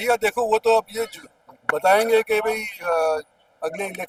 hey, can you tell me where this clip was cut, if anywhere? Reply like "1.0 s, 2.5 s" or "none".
none